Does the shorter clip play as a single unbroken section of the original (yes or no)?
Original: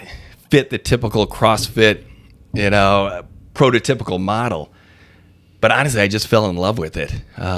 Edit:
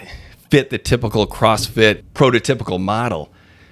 no